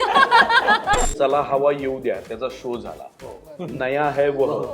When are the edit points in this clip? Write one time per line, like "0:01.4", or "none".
0:01.1